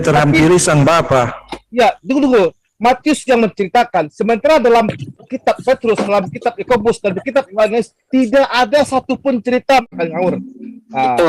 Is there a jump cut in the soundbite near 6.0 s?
no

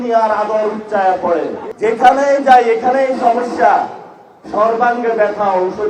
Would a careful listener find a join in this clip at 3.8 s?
no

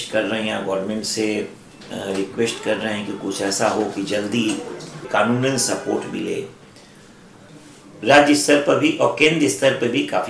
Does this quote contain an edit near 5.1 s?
yes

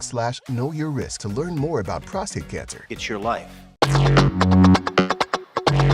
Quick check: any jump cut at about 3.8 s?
yes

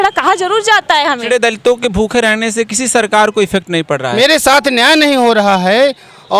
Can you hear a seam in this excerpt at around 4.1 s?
yes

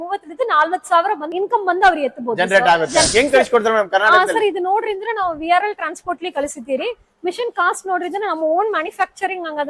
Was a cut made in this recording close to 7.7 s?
no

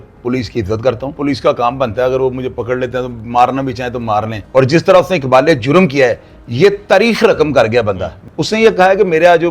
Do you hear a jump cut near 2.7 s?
no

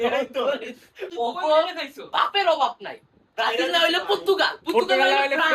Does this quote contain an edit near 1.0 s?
yes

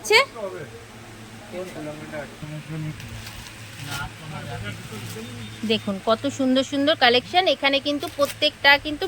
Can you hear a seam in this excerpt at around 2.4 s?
yes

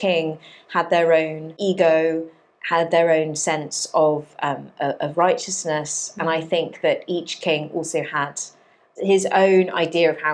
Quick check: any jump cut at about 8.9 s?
yes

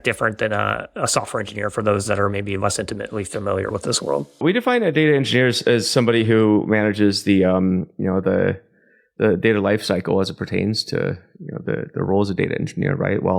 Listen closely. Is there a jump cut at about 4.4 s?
yes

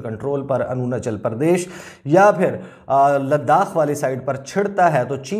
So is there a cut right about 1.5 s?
no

